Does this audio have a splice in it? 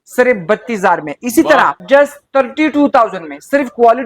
yes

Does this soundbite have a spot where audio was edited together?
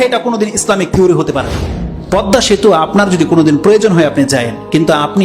yes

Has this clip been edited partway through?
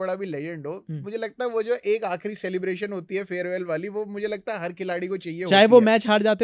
no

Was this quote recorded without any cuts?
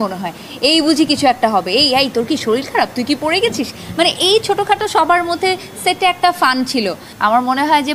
no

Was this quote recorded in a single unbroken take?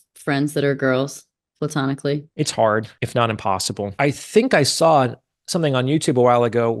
no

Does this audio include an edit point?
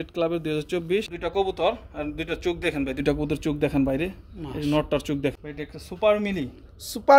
yes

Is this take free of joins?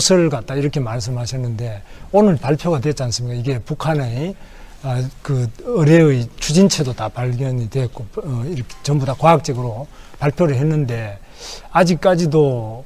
yes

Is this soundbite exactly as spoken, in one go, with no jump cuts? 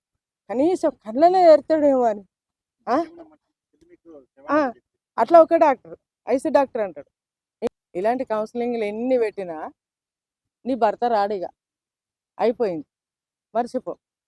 no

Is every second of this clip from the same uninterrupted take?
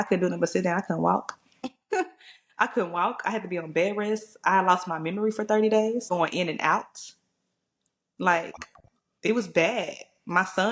no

